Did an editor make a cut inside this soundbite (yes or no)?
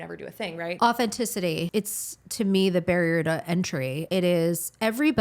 yes